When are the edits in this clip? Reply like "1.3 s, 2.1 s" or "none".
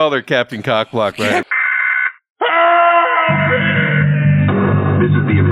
1.4 s